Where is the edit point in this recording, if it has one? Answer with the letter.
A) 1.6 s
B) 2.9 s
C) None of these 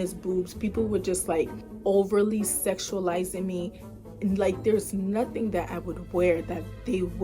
A